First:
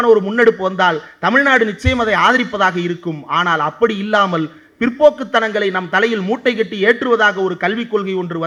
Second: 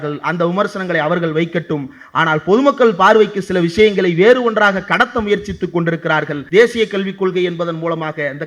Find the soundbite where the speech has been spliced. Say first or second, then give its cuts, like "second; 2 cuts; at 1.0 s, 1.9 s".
second; 1 cut; at 6.4 s